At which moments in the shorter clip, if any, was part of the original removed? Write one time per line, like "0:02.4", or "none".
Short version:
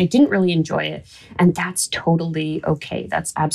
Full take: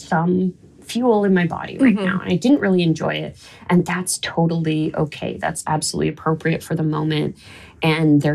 none